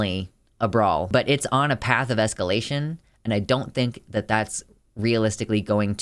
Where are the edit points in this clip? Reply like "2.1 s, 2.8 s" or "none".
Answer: 1.1 s